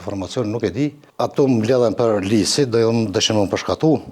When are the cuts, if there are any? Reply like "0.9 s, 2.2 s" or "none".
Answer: 1.0 s